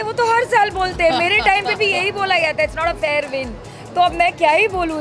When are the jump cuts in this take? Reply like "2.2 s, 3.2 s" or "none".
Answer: none

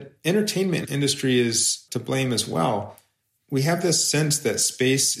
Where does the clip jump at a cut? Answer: 0.8 s, 1.8 s

